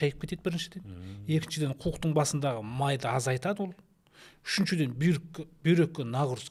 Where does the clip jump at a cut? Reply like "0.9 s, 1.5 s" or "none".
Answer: none